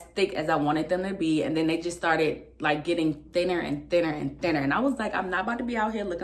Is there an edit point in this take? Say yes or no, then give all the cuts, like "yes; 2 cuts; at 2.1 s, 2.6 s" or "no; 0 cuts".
no; 0 cuts